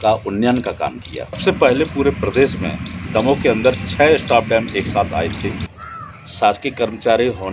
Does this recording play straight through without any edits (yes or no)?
no